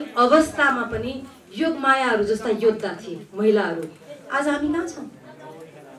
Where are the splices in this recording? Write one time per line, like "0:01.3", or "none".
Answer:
none